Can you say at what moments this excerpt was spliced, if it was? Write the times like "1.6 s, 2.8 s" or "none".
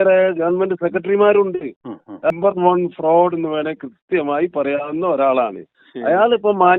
2.3 s